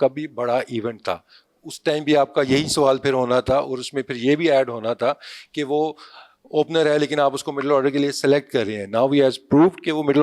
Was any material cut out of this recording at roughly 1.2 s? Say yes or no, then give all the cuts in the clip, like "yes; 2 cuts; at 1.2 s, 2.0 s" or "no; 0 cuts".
no; 0 cuts